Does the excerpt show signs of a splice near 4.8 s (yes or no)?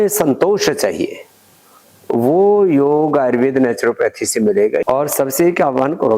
yes